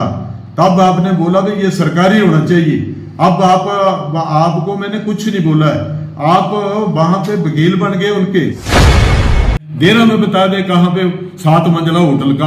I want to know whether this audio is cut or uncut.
cut